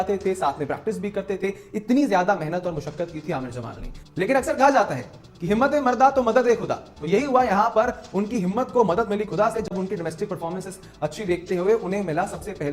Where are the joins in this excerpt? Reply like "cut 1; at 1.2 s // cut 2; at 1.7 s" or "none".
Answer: none